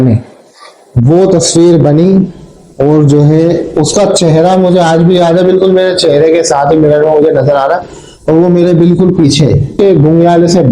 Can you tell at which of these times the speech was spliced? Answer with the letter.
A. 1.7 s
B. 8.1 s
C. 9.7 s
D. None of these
C